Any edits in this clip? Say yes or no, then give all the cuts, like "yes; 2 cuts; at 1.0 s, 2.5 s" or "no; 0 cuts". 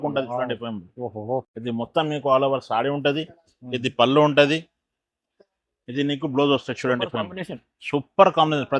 no; 0 cuts